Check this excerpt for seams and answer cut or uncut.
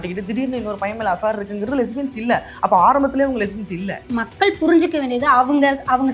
cut